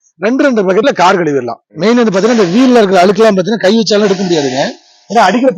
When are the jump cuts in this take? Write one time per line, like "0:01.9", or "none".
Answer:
0:01.6